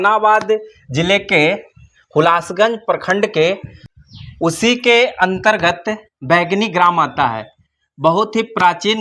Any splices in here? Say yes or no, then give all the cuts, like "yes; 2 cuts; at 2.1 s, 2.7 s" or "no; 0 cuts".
no; 0 cuts